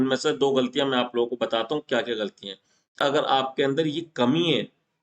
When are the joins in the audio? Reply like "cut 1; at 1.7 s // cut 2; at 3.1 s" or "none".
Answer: cut 1; at 3.0 s